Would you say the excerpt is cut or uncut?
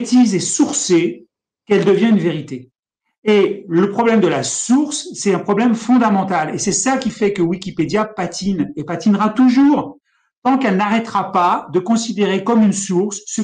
uncut